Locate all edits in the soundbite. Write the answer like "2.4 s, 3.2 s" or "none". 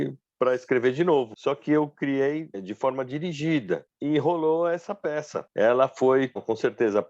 1.3 s, 2.6 s, 3.9 s, 5.4 s

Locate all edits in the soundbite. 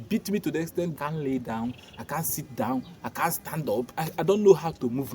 0.9 s, 4.0 s

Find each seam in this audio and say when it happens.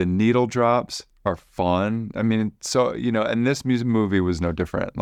none

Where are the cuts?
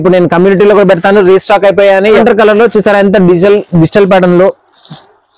2.2 s

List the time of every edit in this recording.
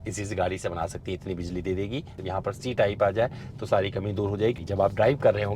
2.1 s, 4.6 s

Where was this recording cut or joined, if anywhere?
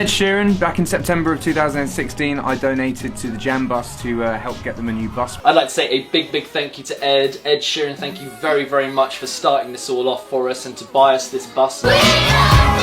5.3 s, 11.8 s

